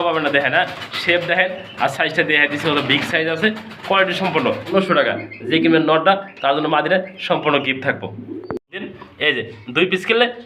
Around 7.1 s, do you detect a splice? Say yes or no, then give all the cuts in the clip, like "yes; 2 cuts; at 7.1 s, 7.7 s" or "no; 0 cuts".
no; 2 cuts; at 4.7 s, 9.0 s